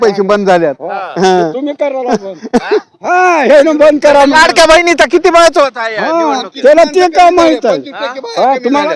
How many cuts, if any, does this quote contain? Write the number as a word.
zero